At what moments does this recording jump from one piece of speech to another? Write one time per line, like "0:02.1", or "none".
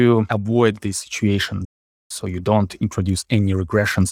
0:02.0